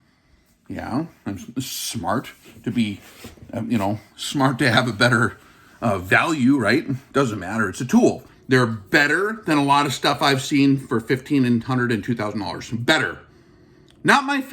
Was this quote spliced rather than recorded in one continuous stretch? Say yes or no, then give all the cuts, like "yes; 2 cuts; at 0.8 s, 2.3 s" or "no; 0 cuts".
yes; 1 cut; at 8.3 s